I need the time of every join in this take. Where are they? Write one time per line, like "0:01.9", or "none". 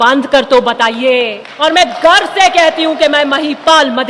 0:01.4